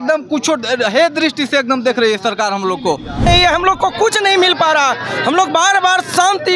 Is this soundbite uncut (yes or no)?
no